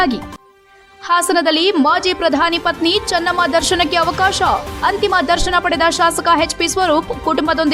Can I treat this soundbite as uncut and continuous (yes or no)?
yes